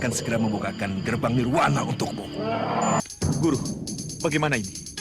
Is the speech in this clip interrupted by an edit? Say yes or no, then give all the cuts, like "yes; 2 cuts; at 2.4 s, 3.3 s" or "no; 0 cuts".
yes; 1 cut; at 3.1 s